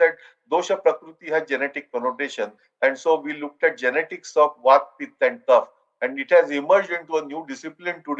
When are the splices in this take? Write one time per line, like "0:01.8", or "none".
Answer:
none